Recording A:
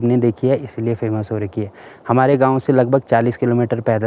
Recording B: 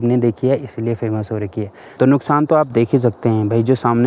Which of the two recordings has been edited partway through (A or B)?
B